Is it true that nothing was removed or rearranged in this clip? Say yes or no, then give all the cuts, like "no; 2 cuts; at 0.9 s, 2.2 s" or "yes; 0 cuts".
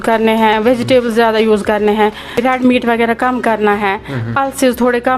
no; 1 cut; at 2.5 s